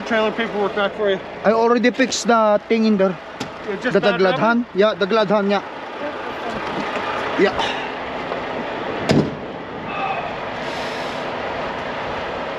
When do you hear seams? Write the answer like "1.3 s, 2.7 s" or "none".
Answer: none